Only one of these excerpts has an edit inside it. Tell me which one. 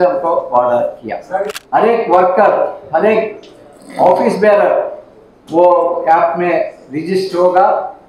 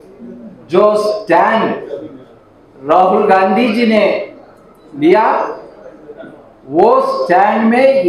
first; 1 cut; at 1.4 s

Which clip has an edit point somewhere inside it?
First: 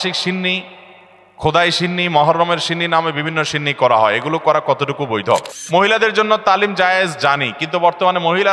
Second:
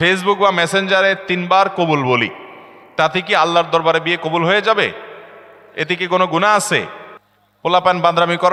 first; 1 cut; at 5.6 s

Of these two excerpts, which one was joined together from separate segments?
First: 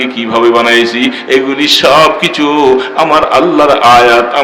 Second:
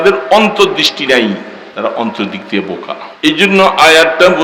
second; 2 cuts; at 1.6 s, 3.0 s

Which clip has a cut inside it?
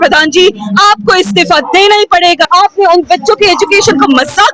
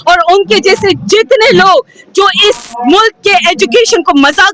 first; 1 cut; at 2.5 s

